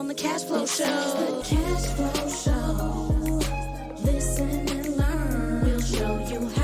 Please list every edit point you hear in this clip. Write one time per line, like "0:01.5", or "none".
0:01.4